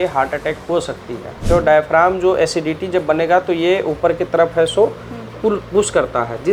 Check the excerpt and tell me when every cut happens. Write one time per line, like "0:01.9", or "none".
0:01.3